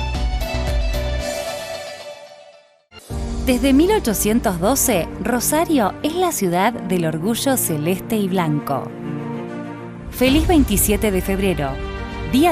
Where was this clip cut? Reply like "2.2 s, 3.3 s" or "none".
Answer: 2.8 s